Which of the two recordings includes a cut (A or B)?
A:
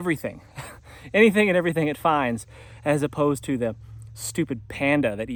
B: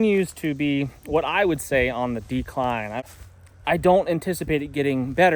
B